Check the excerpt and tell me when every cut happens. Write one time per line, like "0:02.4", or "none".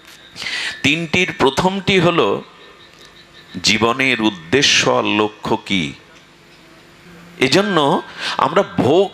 0:07.0